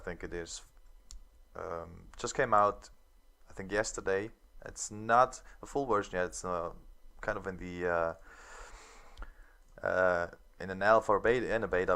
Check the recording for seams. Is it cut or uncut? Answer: cut